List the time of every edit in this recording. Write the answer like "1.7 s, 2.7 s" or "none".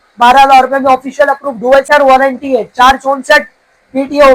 1.9 s